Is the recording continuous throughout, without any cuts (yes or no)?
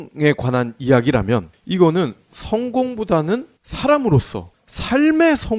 yes